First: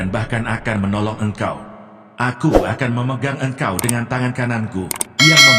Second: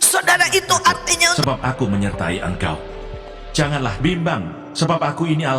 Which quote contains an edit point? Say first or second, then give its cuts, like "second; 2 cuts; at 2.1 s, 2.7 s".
second; 1 cut; at 1.4 s